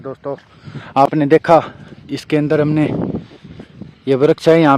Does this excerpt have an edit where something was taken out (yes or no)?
no